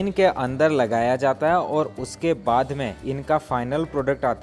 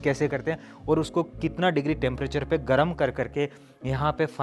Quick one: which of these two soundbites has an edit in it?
first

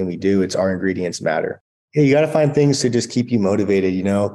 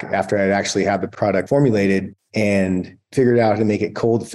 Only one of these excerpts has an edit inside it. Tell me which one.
first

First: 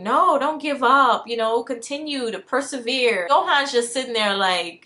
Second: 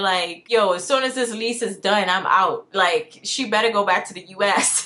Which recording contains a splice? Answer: first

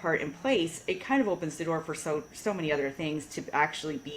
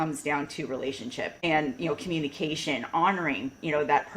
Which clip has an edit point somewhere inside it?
second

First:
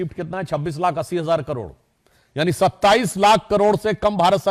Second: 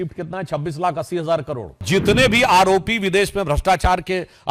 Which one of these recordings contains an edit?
second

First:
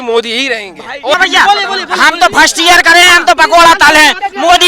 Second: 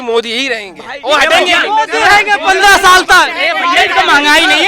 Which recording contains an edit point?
first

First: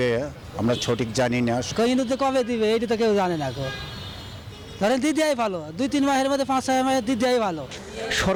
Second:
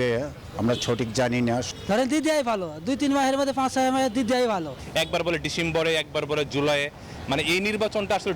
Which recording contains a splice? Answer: second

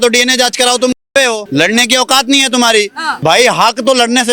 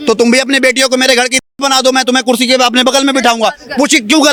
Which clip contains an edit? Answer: first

